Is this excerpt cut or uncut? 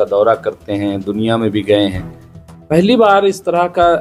uncut